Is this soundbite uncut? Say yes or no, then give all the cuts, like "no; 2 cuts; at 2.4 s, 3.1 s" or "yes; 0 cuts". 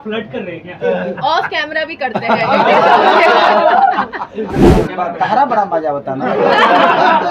no; 1 cut; at 4.8 s